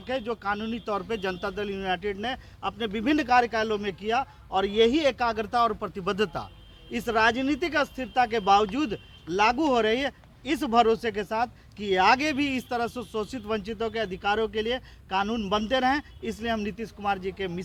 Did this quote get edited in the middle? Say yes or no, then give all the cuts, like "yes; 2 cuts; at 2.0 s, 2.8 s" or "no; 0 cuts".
no; 0 cuts